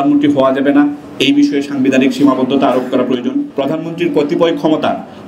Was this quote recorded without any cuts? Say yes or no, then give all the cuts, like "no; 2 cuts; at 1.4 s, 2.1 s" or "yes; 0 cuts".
no; 1 cut; at 3.5 s